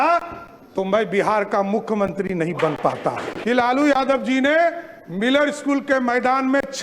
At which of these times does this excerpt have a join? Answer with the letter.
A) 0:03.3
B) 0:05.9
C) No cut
A